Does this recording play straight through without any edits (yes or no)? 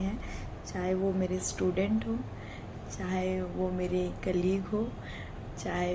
yes